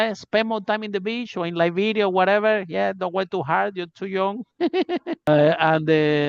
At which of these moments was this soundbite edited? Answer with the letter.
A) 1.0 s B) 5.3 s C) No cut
B